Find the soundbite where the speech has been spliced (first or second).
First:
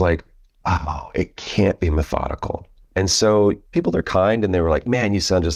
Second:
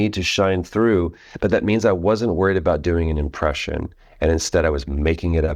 first